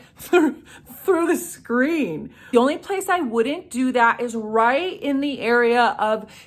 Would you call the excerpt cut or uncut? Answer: cut